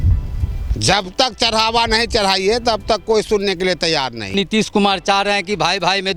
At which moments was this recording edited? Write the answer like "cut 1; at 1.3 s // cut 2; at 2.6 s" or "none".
cut 1; at 4.3 s